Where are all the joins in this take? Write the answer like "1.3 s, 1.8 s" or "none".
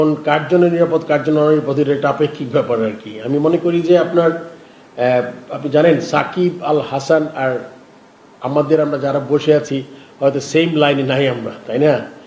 none